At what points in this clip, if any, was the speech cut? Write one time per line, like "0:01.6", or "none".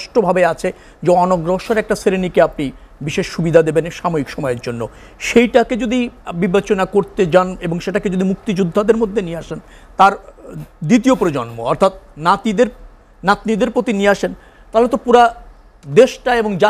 none